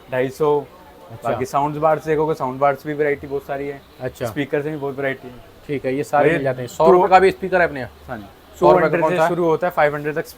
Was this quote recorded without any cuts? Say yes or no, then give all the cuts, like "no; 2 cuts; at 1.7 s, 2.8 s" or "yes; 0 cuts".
yes; 0 cuts